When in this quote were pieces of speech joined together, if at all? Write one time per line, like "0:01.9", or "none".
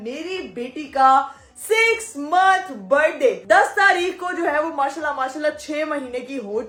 none